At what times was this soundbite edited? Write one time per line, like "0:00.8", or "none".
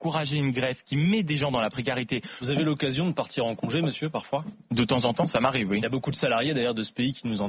0:02.3